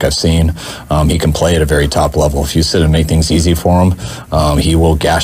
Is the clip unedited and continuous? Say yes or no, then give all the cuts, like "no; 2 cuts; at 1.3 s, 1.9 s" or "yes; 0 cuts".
yes; 0 cuts